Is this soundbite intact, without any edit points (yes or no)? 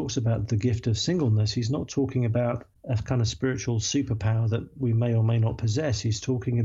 yes